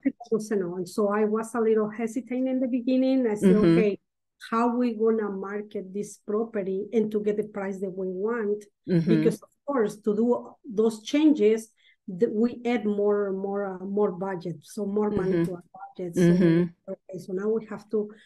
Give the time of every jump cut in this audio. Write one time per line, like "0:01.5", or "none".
none